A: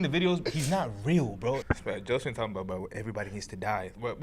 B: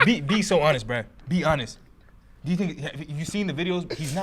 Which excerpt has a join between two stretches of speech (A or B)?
A